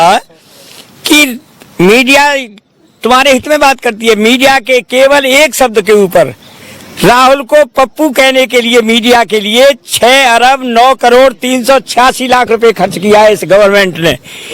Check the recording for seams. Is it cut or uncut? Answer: uncut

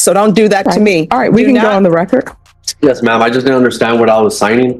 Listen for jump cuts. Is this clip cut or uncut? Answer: cut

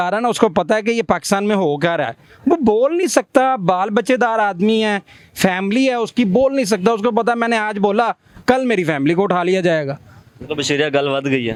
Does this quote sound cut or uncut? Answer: uncut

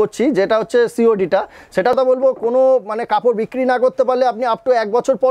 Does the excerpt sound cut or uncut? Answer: cut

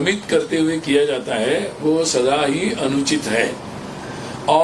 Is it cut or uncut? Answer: uncut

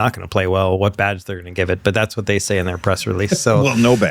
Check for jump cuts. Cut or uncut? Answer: uncut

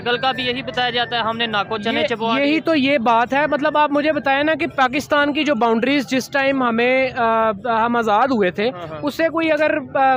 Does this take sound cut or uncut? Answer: uncut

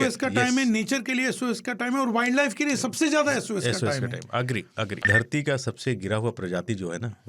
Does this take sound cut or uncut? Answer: cut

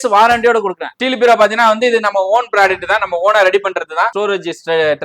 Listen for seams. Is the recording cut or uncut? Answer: cut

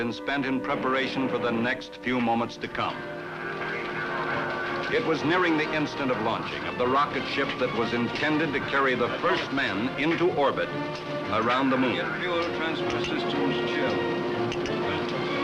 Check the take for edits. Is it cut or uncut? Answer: uncut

